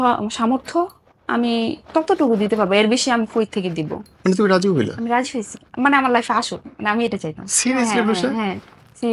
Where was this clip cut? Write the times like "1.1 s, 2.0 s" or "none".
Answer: none